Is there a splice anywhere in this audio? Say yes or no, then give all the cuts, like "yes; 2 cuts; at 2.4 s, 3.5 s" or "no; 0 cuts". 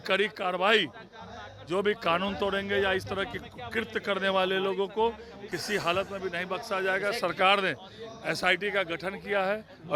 no; 0 cuts